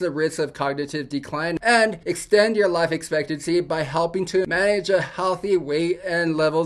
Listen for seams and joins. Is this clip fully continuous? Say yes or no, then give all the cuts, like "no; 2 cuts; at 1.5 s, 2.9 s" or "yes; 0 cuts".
no; 2 cuts; at 1.6 s, 4.5 s